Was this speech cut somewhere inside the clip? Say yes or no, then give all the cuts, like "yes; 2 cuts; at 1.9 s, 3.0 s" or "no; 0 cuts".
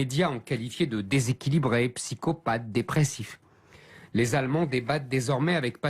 yes; 1 cut; at 2.9 s